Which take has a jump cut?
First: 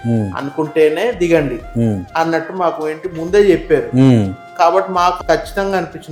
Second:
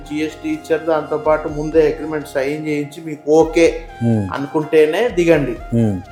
first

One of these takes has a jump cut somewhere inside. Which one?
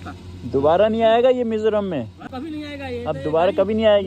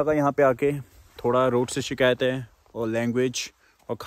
first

